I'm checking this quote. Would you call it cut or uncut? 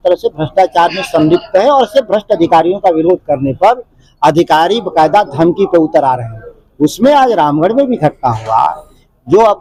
uncut